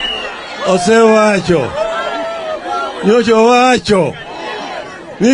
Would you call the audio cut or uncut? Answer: uncut